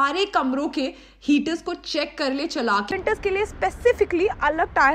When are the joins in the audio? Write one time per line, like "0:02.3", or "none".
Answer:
0:02.9